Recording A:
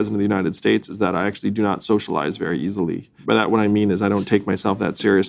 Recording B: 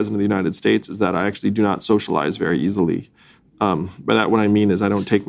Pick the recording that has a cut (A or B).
A